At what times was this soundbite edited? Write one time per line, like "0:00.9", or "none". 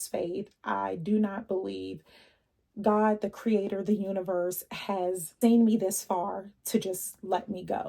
0:05.3